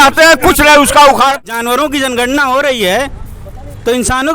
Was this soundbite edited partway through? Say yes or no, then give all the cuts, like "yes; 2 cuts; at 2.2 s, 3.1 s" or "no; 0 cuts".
yes; 1 cut; at 1.4 s